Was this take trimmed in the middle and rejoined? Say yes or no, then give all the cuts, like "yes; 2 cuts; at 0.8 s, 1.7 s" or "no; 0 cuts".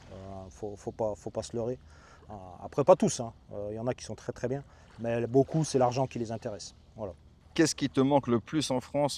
no; 0 cuts